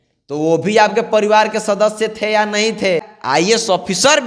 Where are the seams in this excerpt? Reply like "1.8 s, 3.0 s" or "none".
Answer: 3.1 s